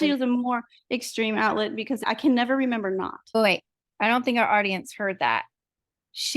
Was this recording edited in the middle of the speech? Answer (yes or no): yes